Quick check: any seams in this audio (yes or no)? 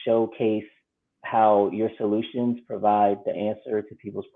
no